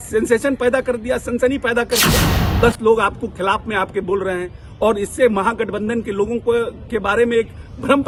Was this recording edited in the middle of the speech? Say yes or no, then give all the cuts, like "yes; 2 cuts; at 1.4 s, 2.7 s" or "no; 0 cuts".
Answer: no; 0 cuts